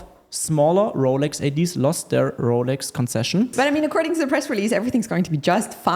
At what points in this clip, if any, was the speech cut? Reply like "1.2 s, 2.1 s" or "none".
3.5 s